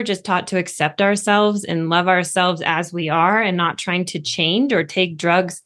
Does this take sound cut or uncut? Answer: uncut